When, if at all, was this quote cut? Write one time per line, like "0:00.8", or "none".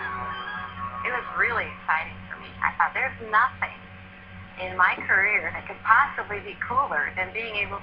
0:04.9